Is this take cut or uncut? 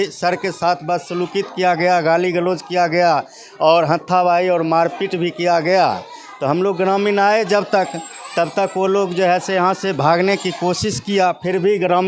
uncut